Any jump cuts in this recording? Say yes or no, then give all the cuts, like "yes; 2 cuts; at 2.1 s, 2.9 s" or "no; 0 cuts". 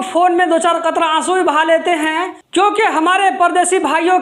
yes; 1 cut; at 2.4 s